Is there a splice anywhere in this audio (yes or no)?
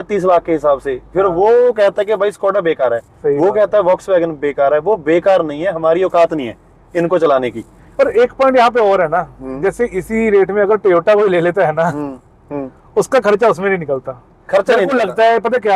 no